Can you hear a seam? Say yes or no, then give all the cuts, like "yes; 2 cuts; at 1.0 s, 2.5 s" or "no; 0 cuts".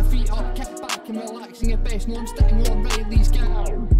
yes; 1 cut; at 1.6 s